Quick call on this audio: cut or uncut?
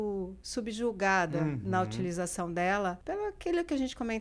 cut